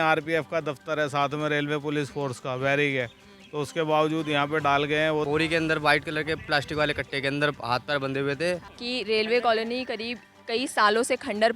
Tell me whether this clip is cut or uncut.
cut